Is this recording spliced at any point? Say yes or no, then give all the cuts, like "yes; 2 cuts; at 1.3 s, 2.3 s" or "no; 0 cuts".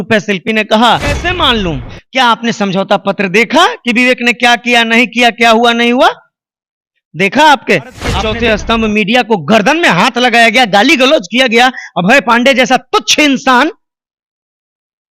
yes; 2 cuts; at 1.3 s, 8.1 s